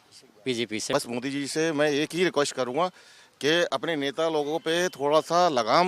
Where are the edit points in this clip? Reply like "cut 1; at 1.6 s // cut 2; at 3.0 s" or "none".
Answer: cut 1; at 0.9 s